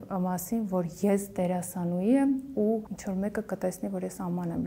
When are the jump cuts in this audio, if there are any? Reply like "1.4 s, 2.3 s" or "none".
2.9 s